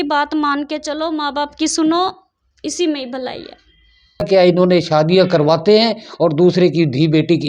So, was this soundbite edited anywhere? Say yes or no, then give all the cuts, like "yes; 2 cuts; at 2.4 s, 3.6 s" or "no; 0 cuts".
yes; 1 cut; at 4.3 s